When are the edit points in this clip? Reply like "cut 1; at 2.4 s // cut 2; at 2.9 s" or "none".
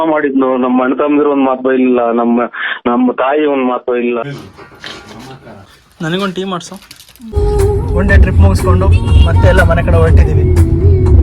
cut 1; at 4.2 s // cut 2; at 7.3 s

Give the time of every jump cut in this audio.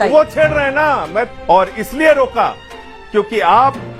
cut 1; at 1.3 s

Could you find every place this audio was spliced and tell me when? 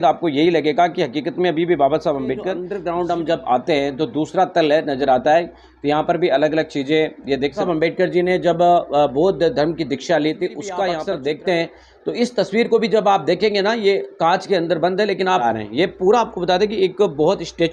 cut 1; at 2.7 s // cut 2; at 7.6 s // cut 3; at 11.0 s // cut 4; at 15.4 s

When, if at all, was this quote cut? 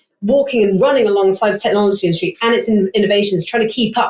none

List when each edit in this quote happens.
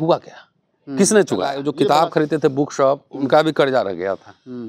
cut 1; at 1.6 s

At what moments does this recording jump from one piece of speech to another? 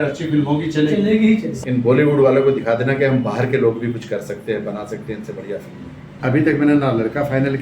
cut 1; at 1.5 s // cut 2; at 6.1 s

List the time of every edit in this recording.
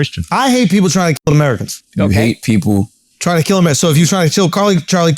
cut 1; at 1.2 s

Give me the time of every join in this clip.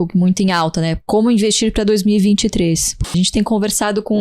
cut 1; at 3.0 s

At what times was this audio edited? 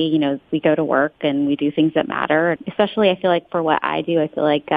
cut 1; at 2.6 s

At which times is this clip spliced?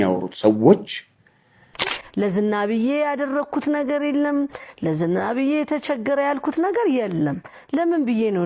cut 1; at 2.0 s

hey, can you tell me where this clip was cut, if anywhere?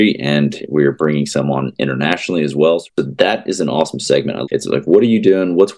cut 1; at 2.9 s // cut 2; at 4.5 s

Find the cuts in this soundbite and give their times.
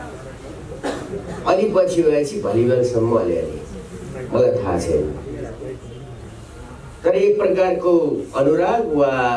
none

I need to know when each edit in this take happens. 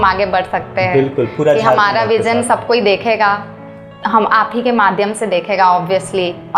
none

